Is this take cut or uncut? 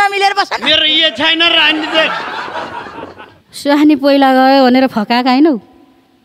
uncut